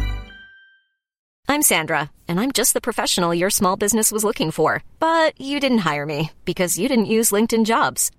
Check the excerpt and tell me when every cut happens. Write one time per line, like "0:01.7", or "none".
0:01.3